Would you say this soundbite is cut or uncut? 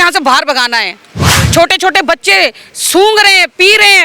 cut